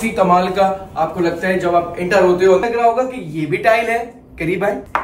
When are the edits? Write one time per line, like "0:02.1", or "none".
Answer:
0:02.6